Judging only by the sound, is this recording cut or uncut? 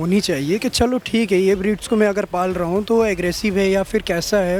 uncut